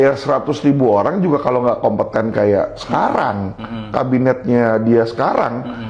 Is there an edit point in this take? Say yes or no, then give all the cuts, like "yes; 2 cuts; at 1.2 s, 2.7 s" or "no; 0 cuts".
no; 0 cuts